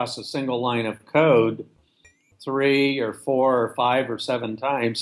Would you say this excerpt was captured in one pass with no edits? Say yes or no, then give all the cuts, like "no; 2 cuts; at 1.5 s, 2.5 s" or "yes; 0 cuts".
yes; 0 cuts